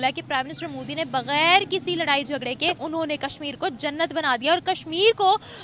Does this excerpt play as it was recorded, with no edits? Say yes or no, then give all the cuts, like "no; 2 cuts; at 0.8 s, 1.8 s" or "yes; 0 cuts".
no; 1 cut; at 2.8 s